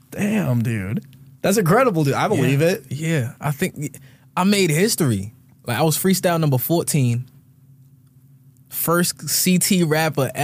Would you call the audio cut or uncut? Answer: uncut